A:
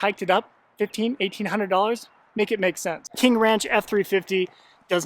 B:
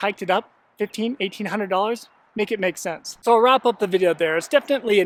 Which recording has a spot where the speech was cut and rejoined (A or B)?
A